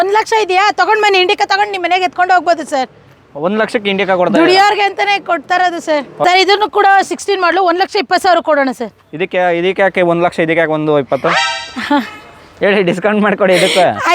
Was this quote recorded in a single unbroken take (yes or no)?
no